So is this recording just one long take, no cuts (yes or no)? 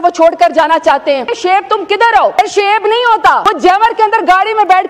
no